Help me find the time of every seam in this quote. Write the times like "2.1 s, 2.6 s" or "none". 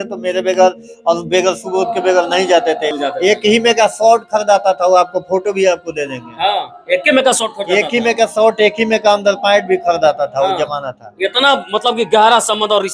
2.9 s